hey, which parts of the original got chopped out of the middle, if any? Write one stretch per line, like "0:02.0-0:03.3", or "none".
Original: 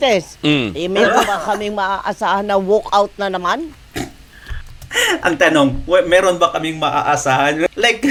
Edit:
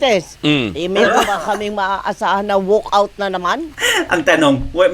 0:03.8-0:04.9